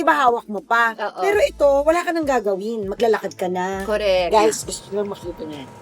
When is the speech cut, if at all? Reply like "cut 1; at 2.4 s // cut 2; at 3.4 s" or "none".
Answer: cut 1; at 4.3 s